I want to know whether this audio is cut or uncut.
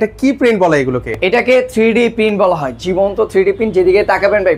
uncut